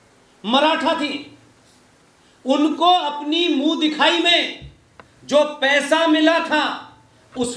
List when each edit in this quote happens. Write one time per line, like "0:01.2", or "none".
none